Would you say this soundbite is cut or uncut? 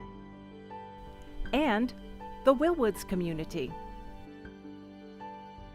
cut